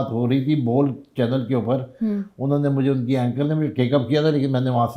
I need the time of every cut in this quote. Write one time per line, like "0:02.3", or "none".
none